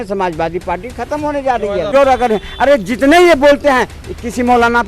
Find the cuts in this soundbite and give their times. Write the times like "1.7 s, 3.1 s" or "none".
1.9 s